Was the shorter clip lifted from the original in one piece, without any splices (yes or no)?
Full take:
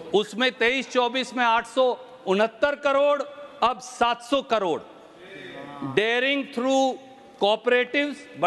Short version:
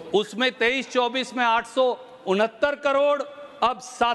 yes